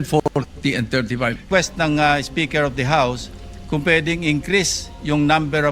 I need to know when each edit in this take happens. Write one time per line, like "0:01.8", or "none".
0:01.4